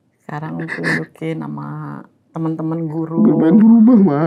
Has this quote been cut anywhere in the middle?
no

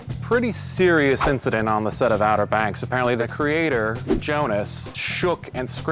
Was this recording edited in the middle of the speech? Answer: yes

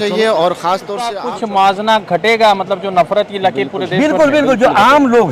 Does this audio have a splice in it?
yes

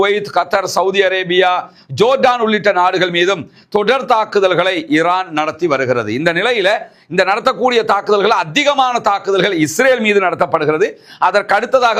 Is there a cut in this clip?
no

